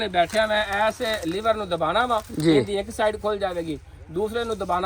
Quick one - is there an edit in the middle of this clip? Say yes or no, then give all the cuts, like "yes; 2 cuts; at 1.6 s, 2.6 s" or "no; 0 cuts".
no; 0 cuts